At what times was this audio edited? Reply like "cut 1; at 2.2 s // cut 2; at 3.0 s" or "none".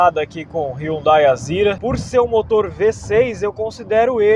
cut 1; at 1.8 s

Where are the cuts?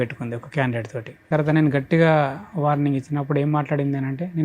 cut 1; at 1.3 s

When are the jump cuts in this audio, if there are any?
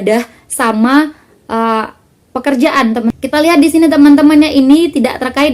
cut 1; at 3.1 s

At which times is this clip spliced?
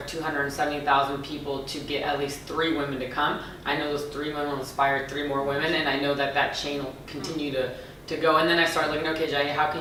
none

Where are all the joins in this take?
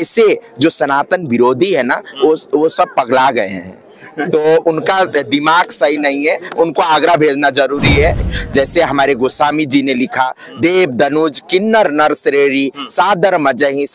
cut 1; at 8.2 s

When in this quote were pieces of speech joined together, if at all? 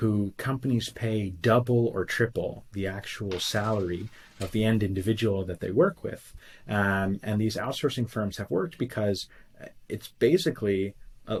none

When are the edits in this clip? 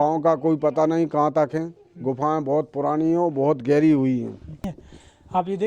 cut 1; at 4.6 s

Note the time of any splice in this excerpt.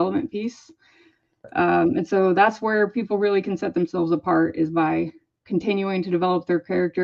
none

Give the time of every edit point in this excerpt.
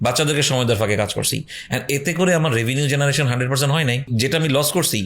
cut 1; at 4.1 s

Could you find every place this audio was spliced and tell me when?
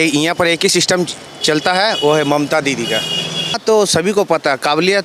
cut 1; at 3.6 s

